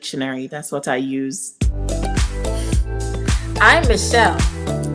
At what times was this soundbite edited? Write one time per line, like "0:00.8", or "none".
0:01.5